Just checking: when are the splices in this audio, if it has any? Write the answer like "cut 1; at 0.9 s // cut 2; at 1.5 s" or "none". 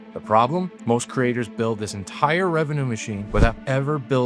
cut 1; at 3.2 s